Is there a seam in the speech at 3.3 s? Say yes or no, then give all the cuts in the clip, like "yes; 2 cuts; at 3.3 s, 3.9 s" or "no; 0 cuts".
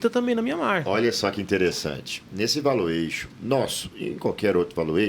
yes; 2 cuts; at 2.2 s, 3.3 s